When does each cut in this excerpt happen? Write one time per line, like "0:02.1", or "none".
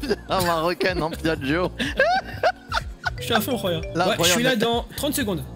0:01.8
0:03.9